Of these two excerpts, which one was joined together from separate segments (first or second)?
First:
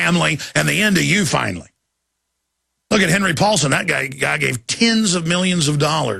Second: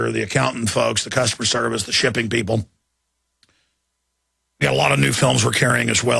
first